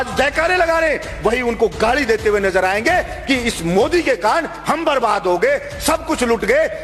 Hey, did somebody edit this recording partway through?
no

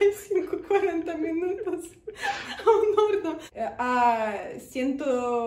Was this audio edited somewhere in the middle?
yes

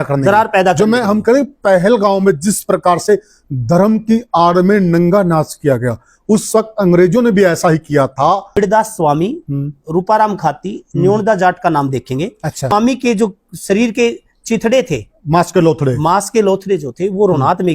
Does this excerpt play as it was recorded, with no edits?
no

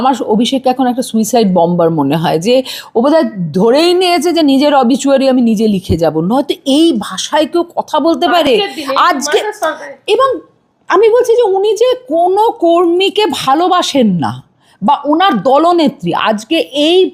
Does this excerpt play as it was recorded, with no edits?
yes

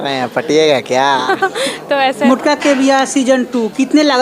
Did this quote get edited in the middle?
yes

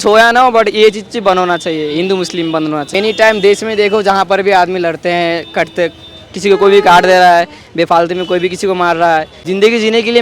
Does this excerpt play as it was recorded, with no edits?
no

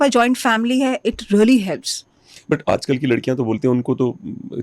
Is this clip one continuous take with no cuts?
yes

